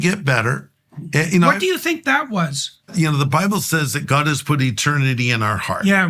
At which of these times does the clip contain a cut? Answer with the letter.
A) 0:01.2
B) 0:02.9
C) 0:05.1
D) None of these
B